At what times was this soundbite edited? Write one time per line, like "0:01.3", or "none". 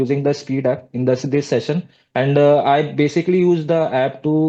none